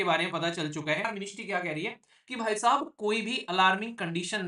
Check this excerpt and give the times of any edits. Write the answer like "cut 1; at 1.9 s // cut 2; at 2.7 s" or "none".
cut 1; at 1.1 s